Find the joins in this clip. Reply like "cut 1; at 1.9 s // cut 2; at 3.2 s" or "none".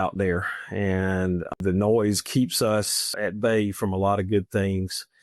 cut 1; at 1.6 s // cut 2; at 3.1 s